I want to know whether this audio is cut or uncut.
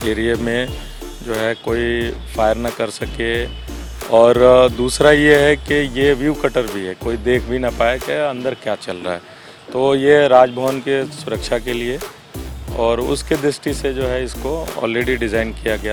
uncut